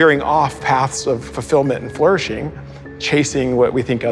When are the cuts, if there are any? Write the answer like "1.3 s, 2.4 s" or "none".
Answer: 1.3 s